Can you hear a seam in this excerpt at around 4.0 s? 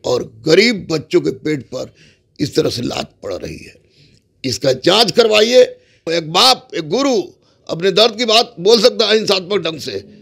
no; 1 cut; at 6.0 s

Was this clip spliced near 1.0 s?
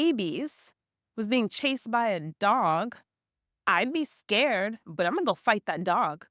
no; 0 cuts

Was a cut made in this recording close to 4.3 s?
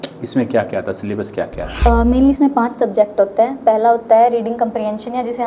no; 1 cut; at 1.9 s

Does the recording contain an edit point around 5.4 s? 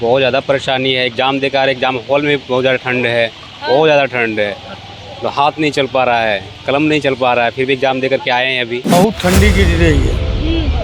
no; 1 cut; at 8.9 s

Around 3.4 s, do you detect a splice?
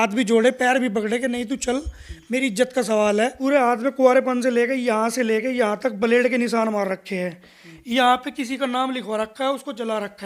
yes; 1 cut; at 3.4 s

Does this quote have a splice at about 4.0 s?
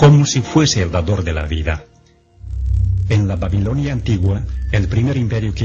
yes; 1 cut; at 4.0 s

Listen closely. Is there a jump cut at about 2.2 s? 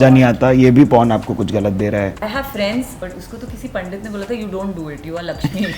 yes; 2 cuts; at 2.2 s, 3.0 s

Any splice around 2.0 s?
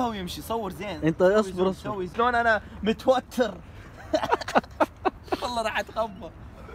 yes; 1 cut; at 2.0 s

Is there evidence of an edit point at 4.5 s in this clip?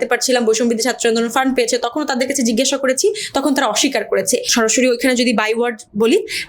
yes; 1 cut; at 4.5 s

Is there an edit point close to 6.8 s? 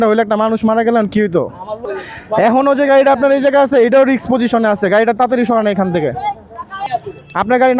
yes; 2 cuts; at 1.8 s, 6.8 s

